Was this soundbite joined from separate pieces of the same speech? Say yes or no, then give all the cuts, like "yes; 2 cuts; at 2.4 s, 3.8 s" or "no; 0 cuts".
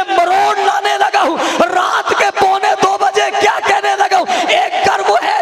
no; 0 cuts